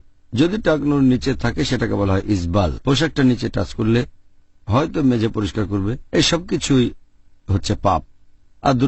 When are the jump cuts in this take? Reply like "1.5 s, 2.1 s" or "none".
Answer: 2.4 s